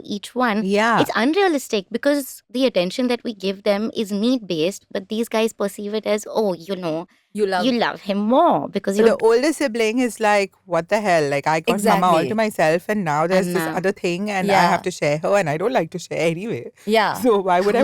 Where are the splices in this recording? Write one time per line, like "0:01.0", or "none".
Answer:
0:02.4
0:09.1